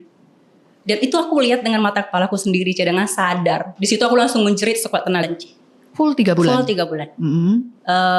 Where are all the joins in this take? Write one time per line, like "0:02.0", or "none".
0:05.2